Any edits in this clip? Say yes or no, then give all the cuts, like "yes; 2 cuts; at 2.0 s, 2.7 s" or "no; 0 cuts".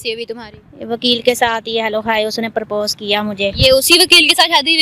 no; 0 cuts